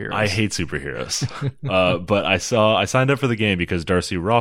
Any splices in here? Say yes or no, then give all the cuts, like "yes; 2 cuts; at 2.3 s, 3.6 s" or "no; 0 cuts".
no; 0 cuts